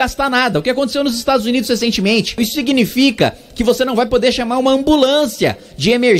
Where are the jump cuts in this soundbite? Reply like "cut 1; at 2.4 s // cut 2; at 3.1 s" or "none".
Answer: cut 1; at 2.4 s